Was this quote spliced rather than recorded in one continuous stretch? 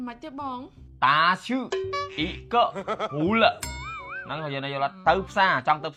no; 0 cuts

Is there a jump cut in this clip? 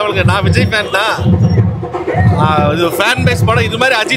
no; 0 cuts

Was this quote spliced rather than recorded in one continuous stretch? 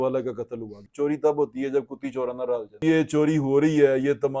yes; 2 cuts; at 0.9 s, 2.8 s

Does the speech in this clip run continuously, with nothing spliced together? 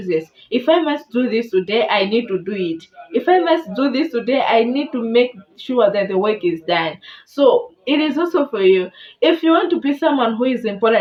yes; 0 cuts

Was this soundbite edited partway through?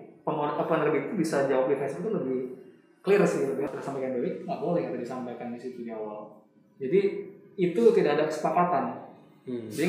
yes; 1 cut; at 3.7 s

